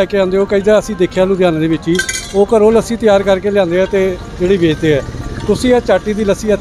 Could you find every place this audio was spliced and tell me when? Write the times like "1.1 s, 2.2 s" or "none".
none